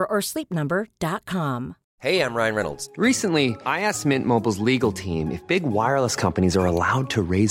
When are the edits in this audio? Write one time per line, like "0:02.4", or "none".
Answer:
0:01.8